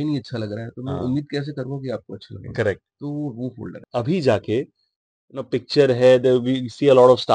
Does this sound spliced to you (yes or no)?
yes